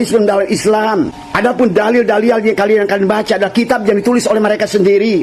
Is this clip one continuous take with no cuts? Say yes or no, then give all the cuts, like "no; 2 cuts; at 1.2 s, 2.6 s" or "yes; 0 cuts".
no; 2 cuts; at 1.2 s, 2.8 s